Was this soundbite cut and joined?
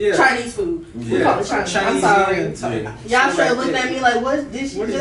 no; 0 cuts

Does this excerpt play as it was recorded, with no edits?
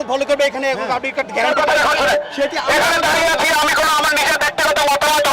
no; 1 cut; at 1.5 s

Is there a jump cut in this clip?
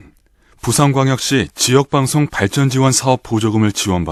no; 0 cuts

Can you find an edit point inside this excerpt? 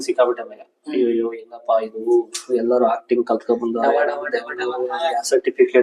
no; 0 cuts

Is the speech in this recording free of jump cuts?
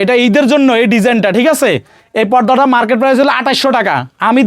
yes; 0 cuts

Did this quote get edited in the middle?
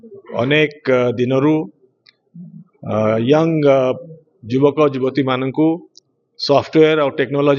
no; 0 cuts

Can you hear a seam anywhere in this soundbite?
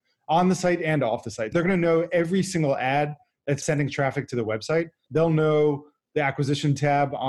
yes; 3 cuts; at 1.5 s, 3.6 s, 5.0 s

